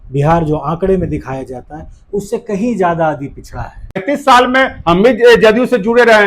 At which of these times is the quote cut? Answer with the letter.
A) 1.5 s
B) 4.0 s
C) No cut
B